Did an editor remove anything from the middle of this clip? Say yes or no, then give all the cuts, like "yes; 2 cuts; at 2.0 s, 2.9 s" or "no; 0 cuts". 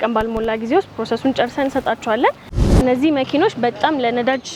yes; 1 cut; at 2.8 s